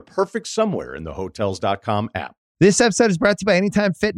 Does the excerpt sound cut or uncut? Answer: cut